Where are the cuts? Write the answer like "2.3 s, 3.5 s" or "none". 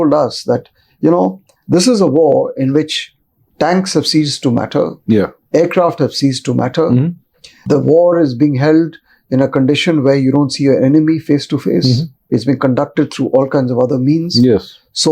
7.6 s, 12.1 s